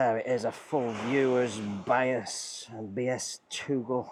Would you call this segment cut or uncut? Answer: uncut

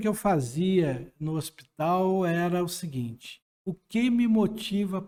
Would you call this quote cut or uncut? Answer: uncut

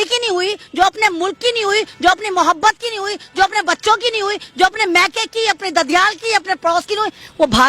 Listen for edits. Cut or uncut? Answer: uncut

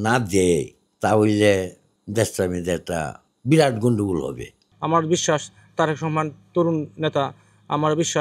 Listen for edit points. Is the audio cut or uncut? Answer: cut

